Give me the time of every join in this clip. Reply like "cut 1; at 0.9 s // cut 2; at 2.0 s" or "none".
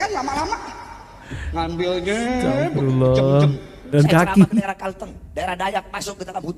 cut 1; at 3.9 s